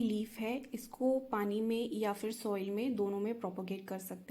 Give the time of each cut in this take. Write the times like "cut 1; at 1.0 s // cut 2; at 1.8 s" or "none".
none